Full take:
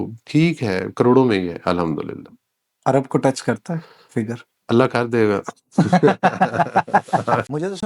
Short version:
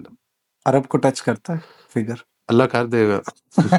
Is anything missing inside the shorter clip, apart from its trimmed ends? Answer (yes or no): no